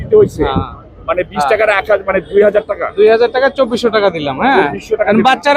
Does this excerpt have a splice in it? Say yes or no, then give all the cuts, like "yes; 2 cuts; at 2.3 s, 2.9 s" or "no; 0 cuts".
no; 0 cuts